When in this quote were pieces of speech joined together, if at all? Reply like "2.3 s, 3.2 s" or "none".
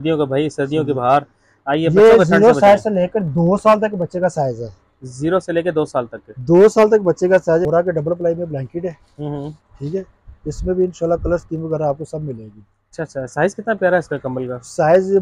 7.6 s